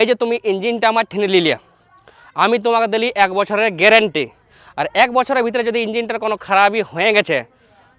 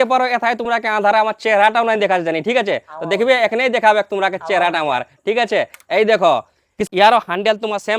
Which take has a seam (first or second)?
second